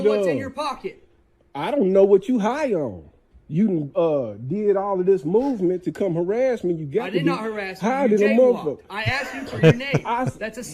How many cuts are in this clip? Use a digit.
0